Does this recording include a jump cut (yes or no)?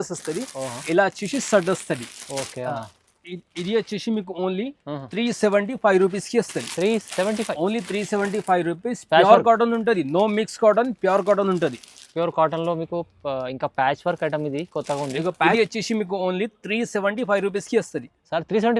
yes